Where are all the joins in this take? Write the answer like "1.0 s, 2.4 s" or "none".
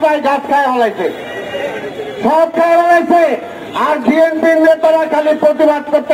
none

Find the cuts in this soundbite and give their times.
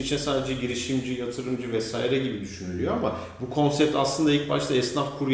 none

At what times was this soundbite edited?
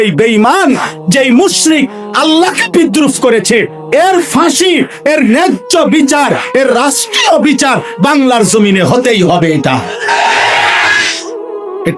none

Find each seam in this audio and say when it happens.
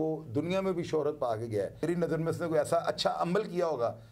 1.8 s

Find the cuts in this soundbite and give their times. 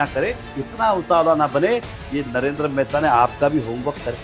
none

